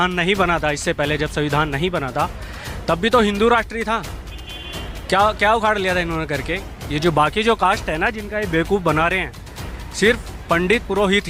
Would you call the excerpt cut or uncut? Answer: uncut